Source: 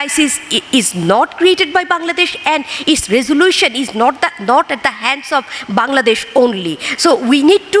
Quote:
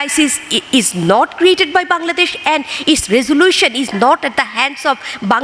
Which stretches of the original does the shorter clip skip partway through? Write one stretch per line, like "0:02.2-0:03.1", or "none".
0:03.9-0:04.4